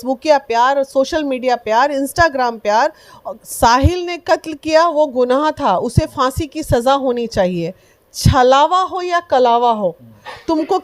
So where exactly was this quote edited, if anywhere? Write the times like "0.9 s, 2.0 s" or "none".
3.4 s